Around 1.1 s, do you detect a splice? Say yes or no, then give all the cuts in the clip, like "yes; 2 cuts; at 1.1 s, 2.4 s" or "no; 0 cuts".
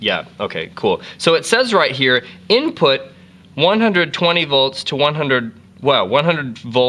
no; 1 cut; at 4.7 s